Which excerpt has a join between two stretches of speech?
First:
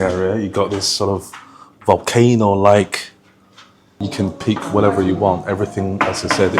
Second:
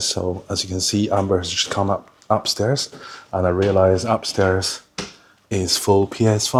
first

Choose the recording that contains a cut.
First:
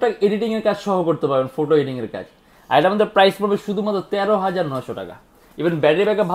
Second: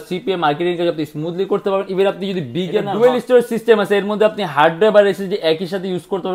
second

